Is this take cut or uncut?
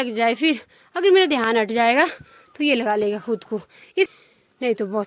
cut